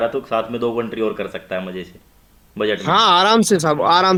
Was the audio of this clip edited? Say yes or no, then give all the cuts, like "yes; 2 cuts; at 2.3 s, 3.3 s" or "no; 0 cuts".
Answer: no; 0 cuts